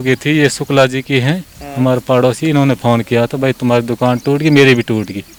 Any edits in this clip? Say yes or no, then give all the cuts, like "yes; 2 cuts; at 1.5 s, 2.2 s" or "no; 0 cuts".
no; 0 cuts